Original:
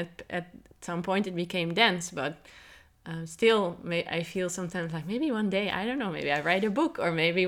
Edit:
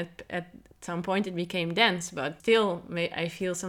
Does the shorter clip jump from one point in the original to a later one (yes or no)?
yes